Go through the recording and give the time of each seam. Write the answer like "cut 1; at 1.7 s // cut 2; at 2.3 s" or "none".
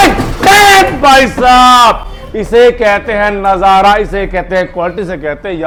none